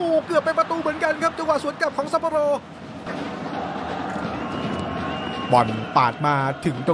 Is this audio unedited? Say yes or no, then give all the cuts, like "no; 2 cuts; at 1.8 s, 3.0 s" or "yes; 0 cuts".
no; 1 cut; at 3.1 s